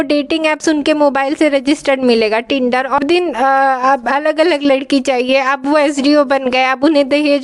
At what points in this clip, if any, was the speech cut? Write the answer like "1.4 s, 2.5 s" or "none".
3.0 s